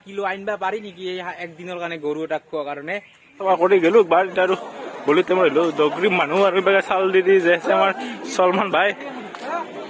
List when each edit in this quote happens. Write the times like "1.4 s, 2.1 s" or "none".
3.4 s